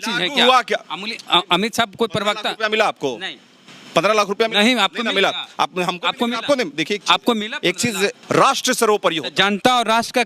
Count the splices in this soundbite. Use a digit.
1